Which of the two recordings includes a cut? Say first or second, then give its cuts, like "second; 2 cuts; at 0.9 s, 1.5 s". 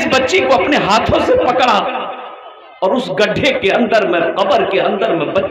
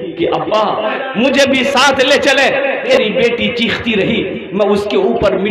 second; 2 cuts; at 1.0 s, 2.9 s